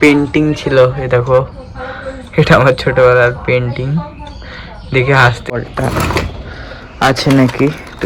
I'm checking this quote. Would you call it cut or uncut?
cut